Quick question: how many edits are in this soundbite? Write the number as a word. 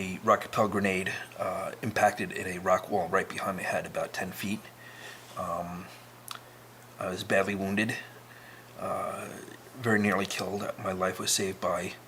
zero